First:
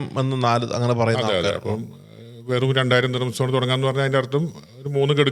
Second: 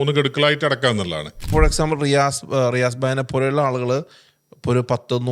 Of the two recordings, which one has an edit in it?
second; 1 cut; at 1.5 s

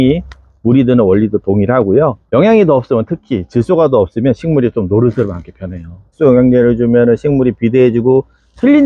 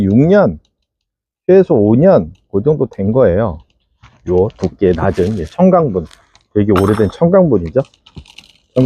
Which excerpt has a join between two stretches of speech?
first; 2 cuts; at 2.2 s, 6.1 s

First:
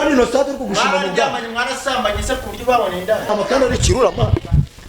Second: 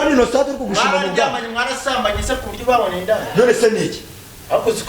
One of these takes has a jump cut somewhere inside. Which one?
first; 1 cut; at 3.3 s

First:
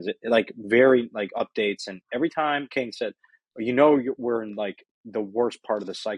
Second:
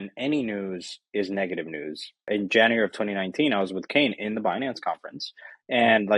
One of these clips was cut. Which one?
second; 1 cut; at 2.3 s

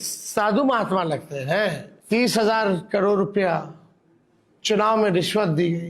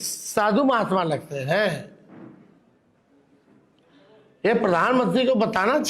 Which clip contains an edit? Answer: first; 1 cut; at 1.9 s

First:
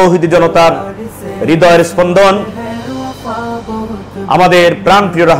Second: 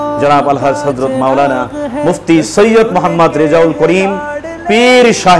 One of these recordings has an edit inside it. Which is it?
first; 2 cuts; at 2.4 s, 3.9 s

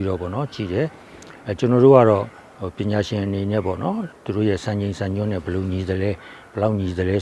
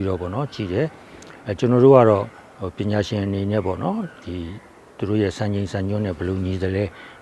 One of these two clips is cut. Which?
first; 1 cut; at 4.1 s

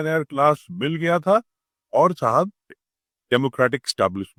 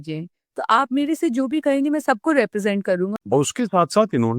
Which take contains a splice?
second; 1 cut; at 3.1 s

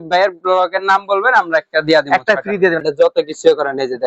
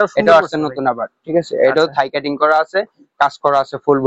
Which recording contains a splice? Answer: first; 1 cut; at 2.8 s

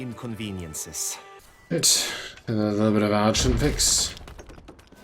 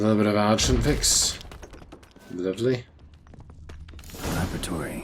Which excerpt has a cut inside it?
first; 1 cut; at 1.4 s

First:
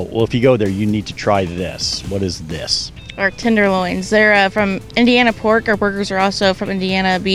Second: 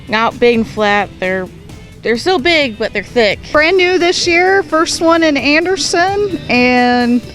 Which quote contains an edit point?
second; 1 cut; at 3.5 s

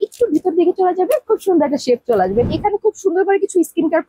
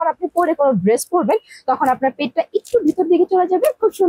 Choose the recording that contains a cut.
first; 1 cut; at 2.5 s

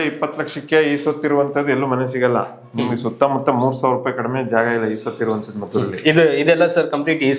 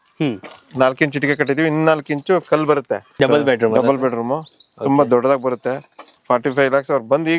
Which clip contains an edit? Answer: second; 2 cuts; at 3.1 s, 6.1 s

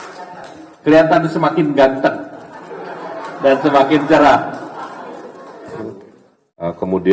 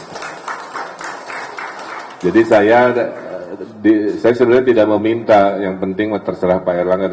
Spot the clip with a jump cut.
first; 1 cut; at 5.8 s

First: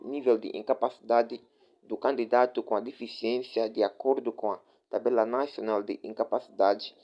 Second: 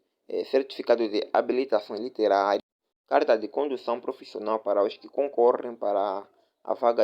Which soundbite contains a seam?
second; 1 cut; at 2.6 s

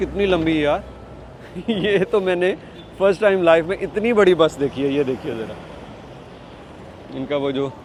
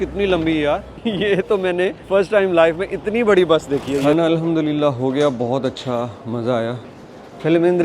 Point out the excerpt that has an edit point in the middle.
second; 3 cuts; at 0.9 s, 2.0 s, 4.1 s

